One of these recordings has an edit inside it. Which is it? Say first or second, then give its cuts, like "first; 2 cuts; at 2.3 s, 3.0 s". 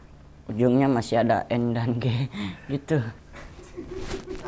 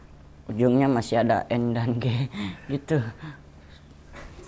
first; 1 cut; at 3.2 s